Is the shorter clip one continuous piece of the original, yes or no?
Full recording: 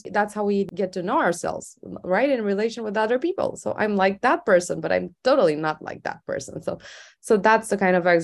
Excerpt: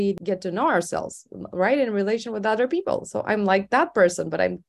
yes